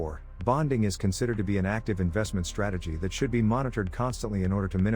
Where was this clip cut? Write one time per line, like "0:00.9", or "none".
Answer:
none